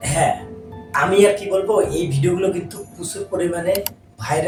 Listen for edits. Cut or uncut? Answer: uncut